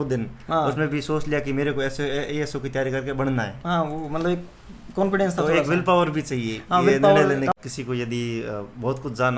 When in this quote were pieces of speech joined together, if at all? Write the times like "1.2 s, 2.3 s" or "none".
7.6 s